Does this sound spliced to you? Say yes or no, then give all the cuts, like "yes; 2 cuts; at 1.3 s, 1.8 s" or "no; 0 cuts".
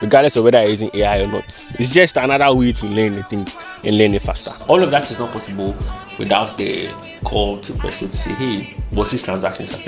yes; 1 cut; at 4.6 s